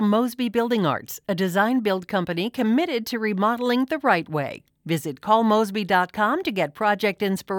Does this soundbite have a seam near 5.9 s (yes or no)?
no